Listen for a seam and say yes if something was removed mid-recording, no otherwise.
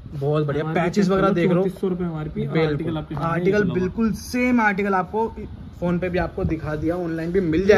no